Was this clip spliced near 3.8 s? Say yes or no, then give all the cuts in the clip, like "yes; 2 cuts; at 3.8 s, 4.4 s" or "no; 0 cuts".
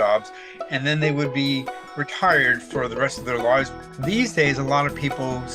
yes; 1 cut; at 3.8 s